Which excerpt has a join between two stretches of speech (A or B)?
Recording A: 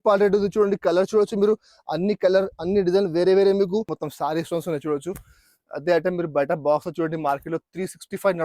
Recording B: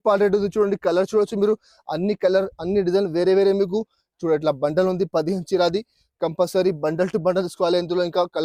A